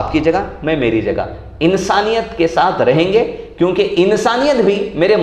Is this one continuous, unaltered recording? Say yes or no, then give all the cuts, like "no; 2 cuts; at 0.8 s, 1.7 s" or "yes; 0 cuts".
yes; 0 cuts